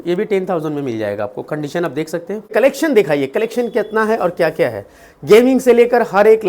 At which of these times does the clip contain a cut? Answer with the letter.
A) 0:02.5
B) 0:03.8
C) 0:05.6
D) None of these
A